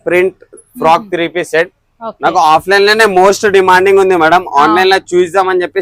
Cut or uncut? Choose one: uncut